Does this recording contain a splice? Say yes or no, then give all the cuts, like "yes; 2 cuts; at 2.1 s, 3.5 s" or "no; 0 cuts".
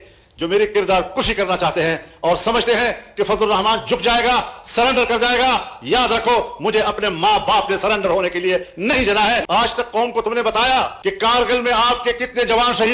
yes; 1 cut; at 9.4 s